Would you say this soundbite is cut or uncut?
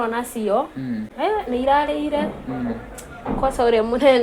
uncut